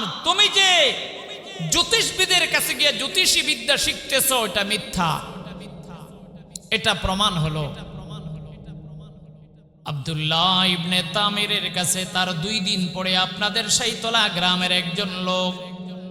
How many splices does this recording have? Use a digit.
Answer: 1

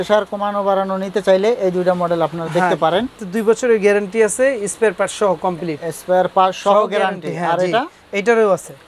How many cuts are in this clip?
1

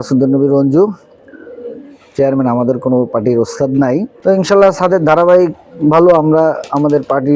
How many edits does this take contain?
1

